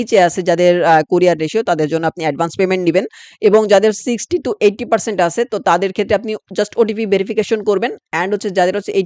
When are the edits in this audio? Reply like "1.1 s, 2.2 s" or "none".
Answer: none